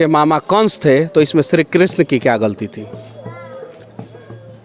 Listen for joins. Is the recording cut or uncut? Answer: uncut